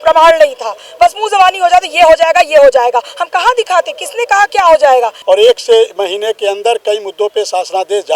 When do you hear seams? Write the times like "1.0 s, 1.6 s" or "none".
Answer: 5.2 s

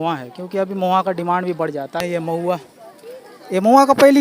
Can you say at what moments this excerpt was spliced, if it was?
2.0 s

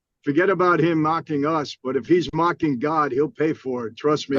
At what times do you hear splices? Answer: none

